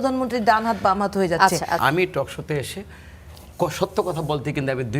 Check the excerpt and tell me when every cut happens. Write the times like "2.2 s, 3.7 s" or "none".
1.8 s